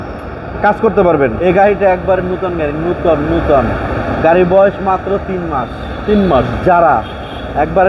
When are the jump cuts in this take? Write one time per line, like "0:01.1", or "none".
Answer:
0:01.4